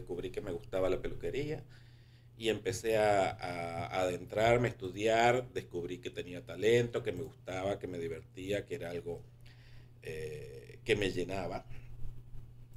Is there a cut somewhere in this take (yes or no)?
no